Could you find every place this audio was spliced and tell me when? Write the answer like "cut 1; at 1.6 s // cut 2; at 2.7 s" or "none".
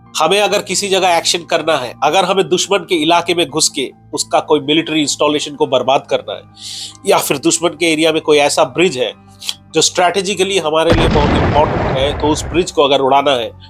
none